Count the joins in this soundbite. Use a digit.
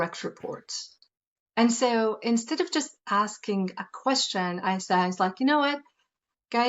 1